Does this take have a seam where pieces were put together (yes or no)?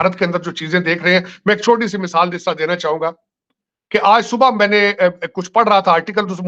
no